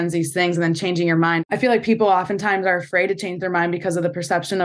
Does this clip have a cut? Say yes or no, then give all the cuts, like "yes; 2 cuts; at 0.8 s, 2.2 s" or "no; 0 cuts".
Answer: yes; 1 cut; at 1.4 s